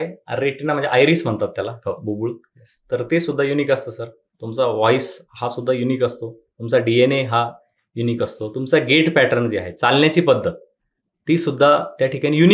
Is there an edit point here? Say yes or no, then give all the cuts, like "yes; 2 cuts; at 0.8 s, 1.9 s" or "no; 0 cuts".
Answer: no; 0 cuts